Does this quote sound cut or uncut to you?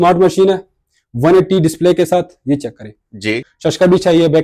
cut